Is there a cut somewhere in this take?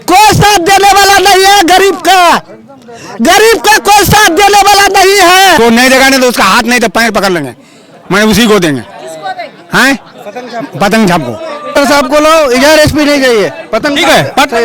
yes; 2 cuts; at 5.6 s, 11.7 s

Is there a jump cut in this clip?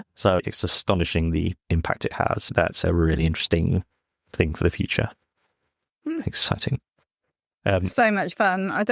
no; 0 cuts

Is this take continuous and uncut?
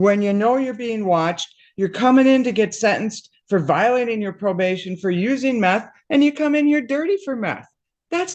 yes; 0 cuts

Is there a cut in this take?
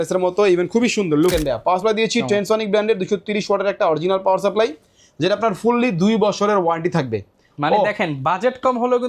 yes; 1 cut; at 1.3 s

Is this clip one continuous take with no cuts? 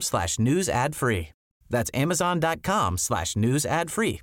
yes; 0 cuts

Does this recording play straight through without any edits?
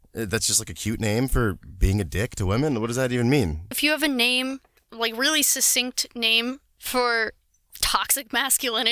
no; 1 cut; at 3.8 s

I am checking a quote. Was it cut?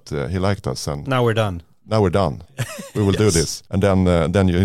yes; 1 cut; at 3.6 s

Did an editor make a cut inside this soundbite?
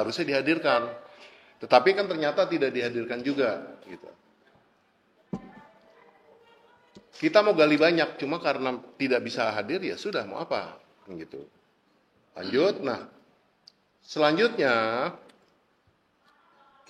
no; 0 cuts

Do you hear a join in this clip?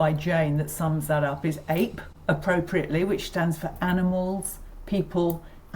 yes; 1 cut; at 2.1 s

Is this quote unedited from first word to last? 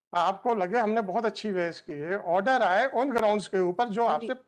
yes; 0 cuts

